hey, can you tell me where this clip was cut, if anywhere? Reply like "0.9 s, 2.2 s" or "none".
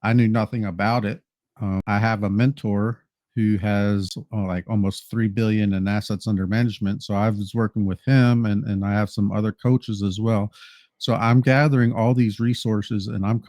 1.8 s, 4.2 s